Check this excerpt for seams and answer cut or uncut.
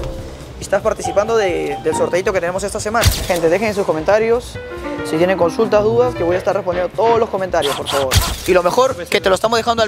cut